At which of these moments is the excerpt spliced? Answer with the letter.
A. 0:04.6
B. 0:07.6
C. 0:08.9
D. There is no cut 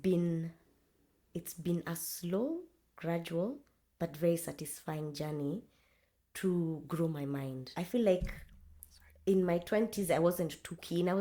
B